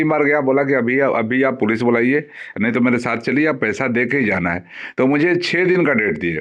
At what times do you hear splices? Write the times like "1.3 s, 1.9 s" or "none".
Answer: none